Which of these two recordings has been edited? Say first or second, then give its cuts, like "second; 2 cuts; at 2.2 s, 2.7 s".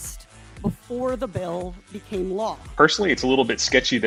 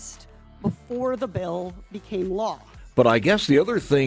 second; 1 cut; at 2.7 s